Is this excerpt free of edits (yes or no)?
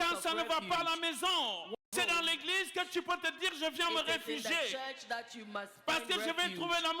no